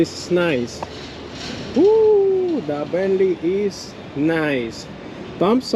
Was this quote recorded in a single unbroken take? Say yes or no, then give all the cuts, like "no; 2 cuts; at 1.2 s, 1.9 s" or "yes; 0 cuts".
yes; 0 cuts